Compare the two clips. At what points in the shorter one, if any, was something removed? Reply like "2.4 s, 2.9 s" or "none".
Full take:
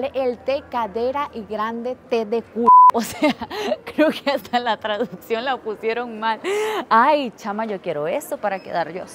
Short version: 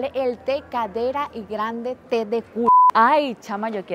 2.9 s